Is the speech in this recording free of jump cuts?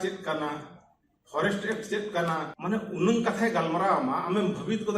no; 1 cut; at 2.5 s

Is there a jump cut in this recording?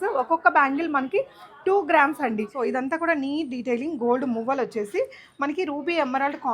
yes; 1 cut; at 2.5 s

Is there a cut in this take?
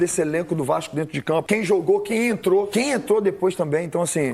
yes; 2 cuts; at 1.4 s, 2.7 s

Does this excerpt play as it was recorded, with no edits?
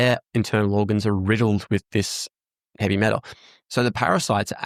yes; 0 cuts

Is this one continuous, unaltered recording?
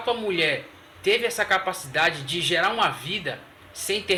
yes; 0 cuts

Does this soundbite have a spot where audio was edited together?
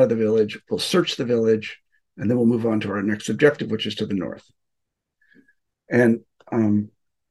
no; 0 cuts

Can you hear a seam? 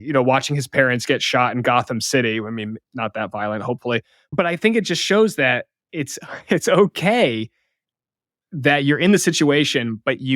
yes; 1 cut; at 4.2 s

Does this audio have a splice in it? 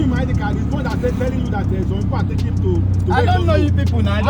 no; 0 cuts

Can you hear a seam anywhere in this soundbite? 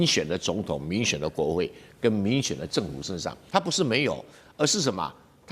yes; 1 cut; at 3.4 s

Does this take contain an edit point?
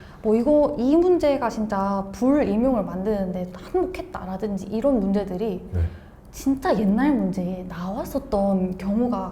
no; 0 cuts

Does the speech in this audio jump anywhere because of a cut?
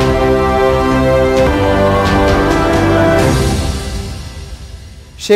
yes; 1 cut; at 4.3 s

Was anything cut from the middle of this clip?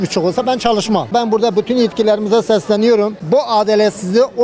yes; 2 cuts; at 1.1 s, 3.2 s

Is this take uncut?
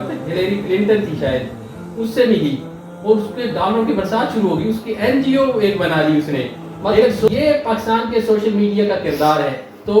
no; 1 cut; at 7.2 s

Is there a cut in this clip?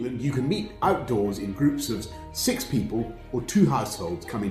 no; 0 cuts

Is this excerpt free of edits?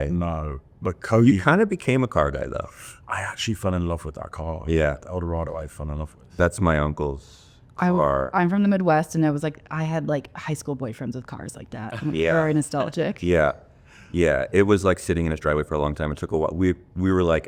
yes; 0 cuts

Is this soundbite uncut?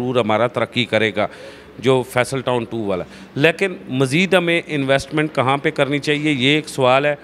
yes; 0 cuts

